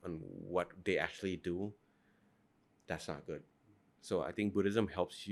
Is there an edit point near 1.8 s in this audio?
no; 0 cuts

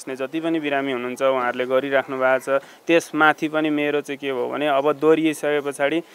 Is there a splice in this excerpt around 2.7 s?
no; 0 cuts

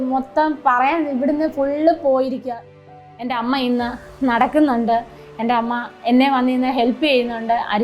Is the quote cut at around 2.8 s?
yes; 1 cut; at 2.8 s

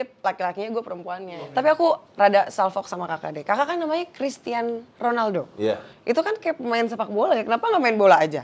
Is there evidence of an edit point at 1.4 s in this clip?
yes; 1 cut; at 1.4 s

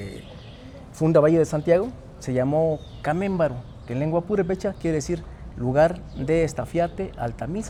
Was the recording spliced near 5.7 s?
no; 0 cuts

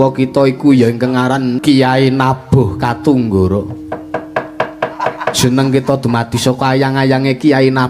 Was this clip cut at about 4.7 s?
no; 1 cut; at 1.6 s

